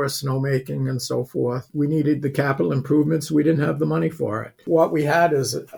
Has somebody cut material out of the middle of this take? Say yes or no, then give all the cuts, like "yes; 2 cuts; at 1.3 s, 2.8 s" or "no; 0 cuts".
yes; 2 cuts; at 1.7 s, 4.6 s